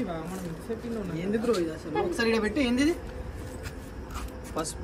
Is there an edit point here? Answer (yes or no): no